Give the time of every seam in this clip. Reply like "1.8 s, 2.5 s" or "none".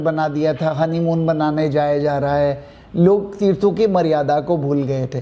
none